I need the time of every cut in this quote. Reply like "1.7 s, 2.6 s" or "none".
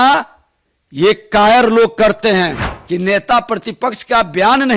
2.7 s